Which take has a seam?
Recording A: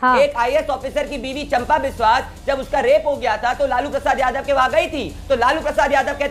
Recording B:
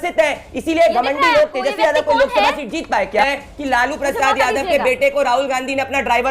B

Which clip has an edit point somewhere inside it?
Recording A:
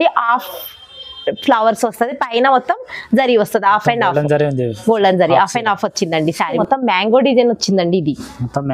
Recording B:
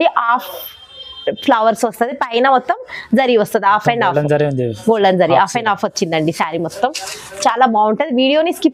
A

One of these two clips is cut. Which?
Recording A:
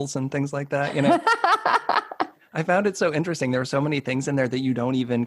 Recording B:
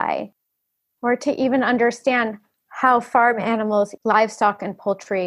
B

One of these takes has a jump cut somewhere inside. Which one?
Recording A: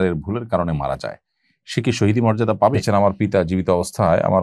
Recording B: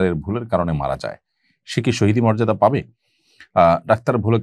A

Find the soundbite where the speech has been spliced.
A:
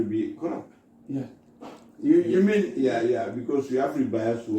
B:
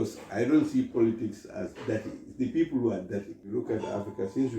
B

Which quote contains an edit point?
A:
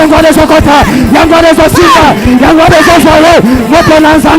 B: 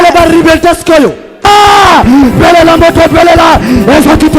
B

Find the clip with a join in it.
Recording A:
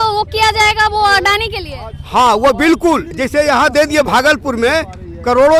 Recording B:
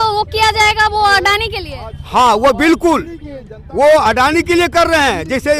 A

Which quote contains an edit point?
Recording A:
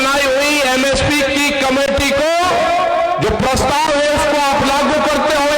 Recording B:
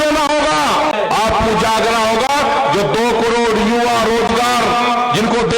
B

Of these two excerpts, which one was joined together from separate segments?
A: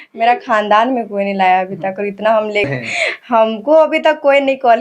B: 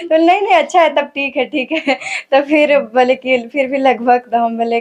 A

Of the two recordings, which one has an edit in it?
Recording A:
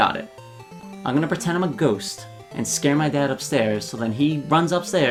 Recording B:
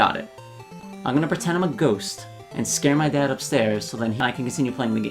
B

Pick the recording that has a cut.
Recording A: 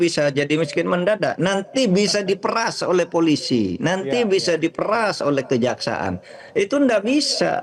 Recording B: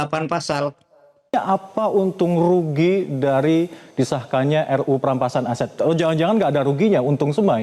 B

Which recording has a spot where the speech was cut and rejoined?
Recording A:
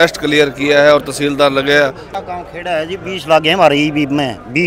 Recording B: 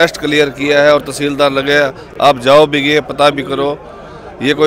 A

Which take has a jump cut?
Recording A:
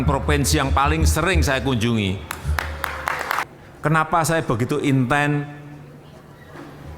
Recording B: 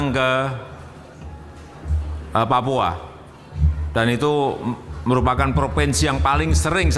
A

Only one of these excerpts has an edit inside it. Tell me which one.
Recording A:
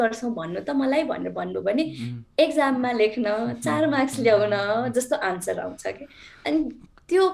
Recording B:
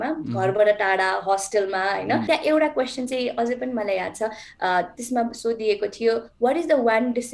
B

